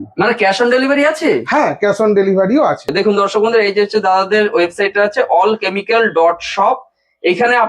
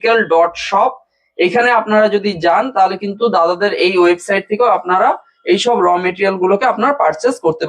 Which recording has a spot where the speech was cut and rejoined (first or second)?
first